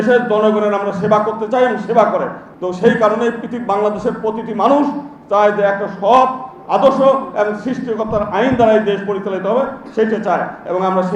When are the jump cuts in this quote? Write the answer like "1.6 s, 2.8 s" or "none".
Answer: 2.4 s